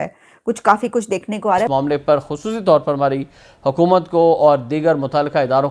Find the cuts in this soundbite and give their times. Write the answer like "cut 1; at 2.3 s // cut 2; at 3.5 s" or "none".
cut 1; at 1.7 s